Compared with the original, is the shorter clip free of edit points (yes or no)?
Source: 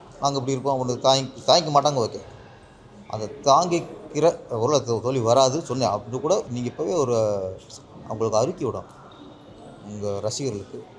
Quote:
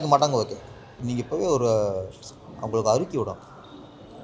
no